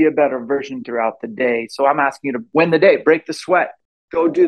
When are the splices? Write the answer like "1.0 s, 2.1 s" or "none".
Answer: 2.5 s